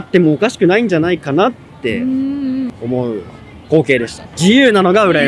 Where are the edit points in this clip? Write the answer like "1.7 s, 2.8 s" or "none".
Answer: 4.3 s